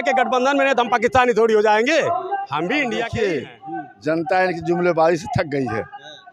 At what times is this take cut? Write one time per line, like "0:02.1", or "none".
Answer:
0:03.1